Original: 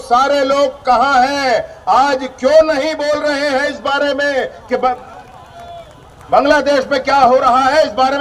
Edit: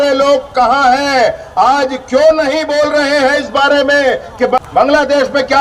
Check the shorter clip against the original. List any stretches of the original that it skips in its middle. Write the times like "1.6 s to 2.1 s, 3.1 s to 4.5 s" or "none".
4.9 s to 6.1 s